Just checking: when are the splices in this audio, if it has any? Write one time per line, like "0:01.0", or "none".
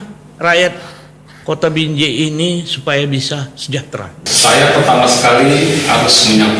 0:04.2